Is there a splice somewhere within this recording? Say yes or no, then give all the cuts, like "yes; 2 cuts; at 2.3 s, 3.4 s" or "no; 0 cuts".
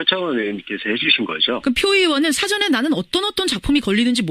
yes; 1 cut; at 2.6 s